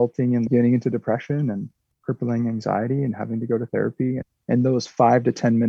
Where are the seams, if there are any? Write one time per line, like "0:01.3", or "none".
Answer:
0:04.4